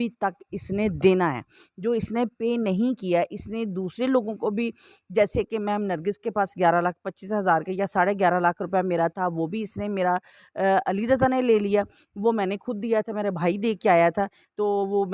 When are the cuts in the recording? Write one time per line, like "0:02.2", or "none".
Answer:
none

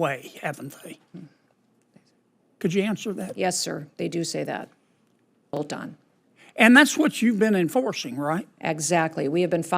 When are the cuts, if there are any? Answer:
0:05.6

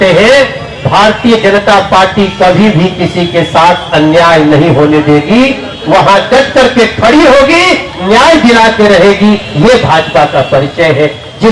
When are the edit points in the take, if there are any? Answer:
none

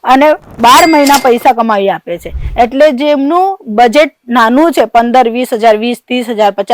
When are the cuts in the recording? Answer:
none

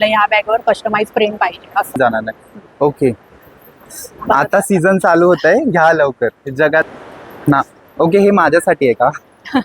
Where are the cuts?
0:02.0
0:06.9

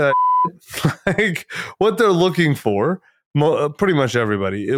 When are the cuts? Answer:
none

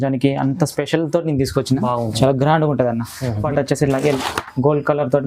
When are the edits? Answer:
0:03.4

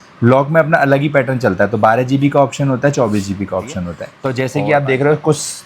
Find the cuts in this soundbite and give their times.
0:04.1

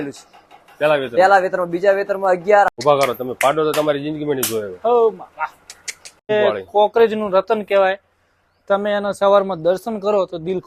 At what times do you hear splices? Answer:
0:02.7
0:06.2

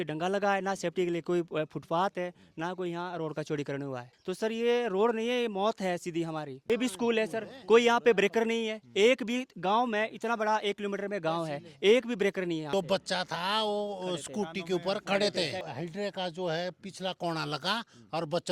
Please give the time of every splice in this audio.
0:04.1
0:06.7
0:12.7
0:15.6

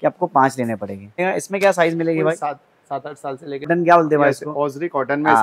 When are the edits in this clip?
0:01.2
0:03.7

